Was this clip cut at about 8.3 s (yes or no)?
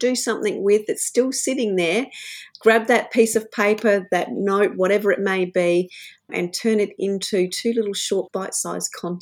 yes